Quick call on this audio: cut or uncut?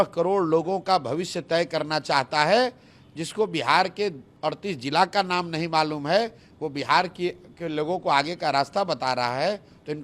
uncut